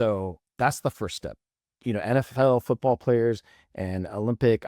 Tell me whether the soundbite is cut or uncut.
cut